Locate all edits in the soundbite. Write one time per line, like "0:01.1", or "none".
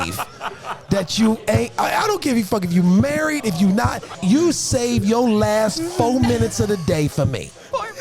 0:04.0